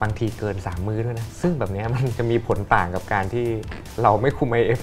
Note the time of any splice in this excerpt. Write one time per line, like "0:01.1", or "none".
0:01.3